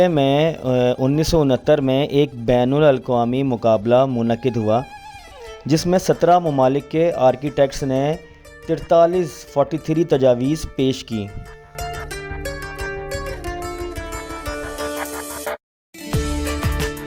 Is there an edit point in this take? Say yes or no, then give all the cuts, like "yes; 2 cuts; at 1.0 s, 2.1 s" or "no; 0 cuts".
no; 0 cuts